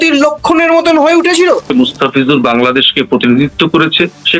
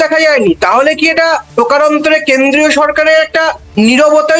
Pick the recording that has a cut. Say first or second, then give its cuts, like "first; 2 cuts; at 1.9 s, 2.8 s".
first; 1 cut; at 1.7 s